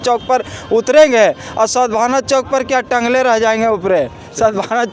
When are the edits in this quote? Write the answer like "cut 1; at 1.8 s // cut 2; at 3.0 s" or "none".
none